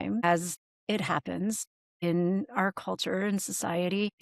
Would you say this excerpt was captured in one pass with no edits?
yes; 0 cuts

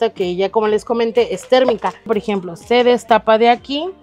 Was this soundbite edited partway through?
yes; 1 cut; at 2.1 s

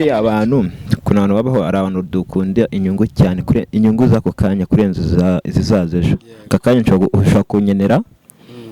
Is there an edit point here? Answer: no; 0 cuts

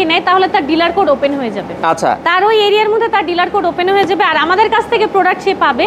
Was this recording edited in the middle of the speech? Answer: no; 0 cuts

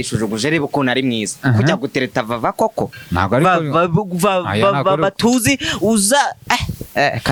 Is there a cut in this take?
no; 0 cuts

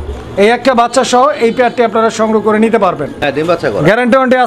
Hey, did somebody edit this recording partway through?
yes; 1 cut; at 3.2 s

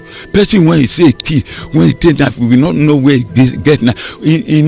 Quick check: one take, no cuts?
yes; 0 cuts

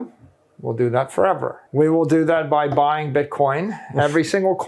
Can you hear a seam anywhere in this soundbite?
yes; 1 cut; at 1.6 s

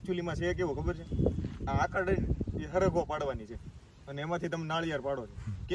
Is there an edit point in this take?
no; 0 cuts

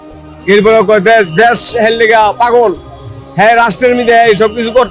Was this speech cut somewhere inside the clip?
no; 0 cuts

